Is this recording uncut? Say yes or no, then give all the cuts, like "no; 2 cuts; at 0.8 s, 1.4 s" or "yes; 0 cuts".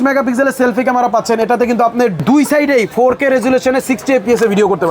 no; 1 cut; at 2.2 s